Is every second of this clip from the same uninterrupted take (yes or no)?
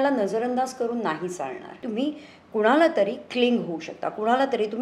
no